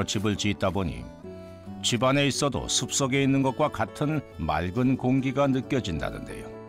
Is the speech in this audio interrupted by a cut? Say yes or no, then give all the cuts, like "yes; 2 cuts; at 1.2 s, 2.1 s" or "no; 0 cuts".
no; 0 cuts